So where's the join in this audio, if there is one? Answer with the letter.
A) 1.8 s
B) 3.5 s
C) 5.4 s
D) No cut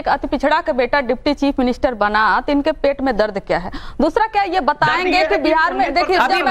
A